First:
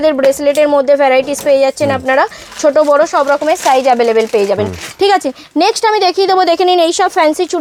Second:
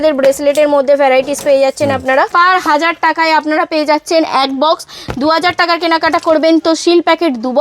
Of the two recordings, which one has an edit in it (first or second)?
second